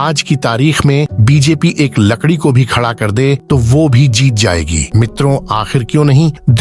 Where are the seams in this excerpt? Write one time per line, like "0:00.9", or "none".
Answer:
0:04.8